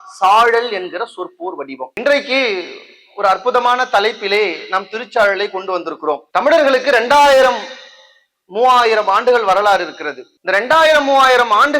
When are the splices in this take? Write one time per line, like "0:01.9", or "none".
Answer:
none